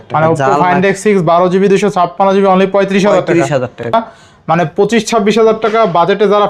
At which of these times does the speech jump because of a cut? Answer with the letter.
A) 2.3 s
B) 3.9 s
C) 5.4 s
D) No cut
B